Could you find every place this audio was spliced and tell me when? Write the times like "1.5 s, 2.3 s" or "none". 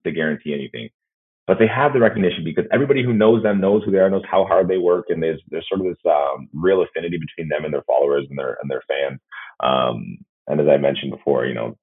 none

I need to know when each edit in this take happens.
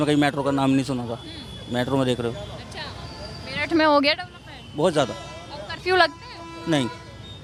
none

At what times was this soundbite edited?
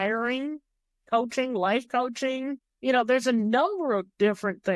2.7 s

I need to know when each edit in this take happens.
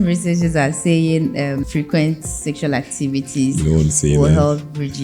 1.6 s

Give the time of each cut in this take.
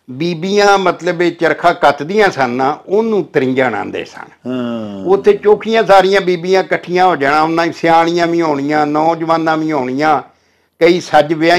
none

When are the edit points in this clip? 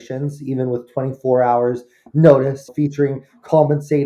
2.7 s

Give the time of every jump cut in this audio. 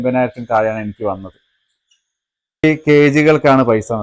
2.6 s

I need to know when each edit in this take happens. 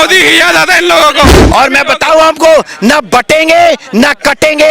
1.4 s

